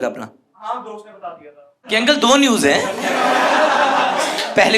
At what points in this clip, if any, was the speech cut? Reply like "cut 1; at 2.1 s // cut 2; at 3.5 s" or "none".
cut 1; at 1.8 s